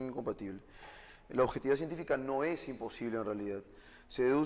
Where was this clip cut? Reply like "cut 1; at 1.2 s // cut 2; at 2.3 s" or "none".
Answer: cut 1; at 2.8 s